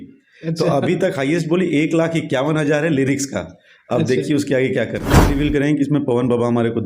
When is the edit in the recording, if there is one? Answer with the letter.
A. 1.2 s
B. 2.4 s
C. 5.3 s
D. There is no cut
C